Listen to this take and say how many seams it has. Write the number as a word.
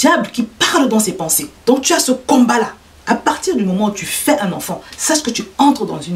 one